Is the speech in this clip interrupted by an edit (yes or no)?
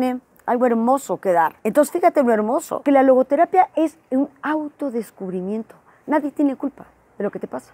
yes